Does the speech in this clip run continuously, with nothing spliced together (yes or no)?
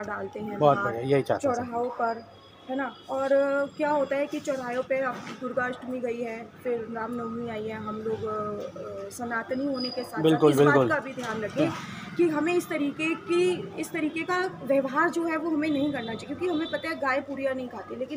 yes